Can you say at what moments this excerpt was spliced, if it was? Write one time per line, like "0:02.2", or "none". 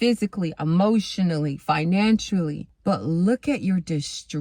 0:02.6